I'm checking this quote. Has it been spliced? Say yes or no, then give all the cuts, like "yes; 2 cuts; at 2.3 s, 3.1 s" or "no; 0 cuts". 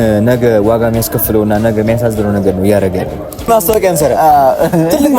yes; 1 cut; at 3.4 s